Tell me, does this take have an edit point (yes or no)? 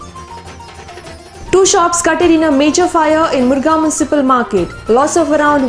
yes